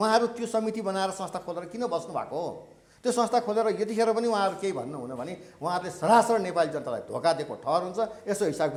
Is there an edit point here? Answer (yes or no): no